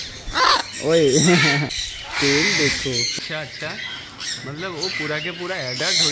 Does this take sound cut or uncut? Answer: cut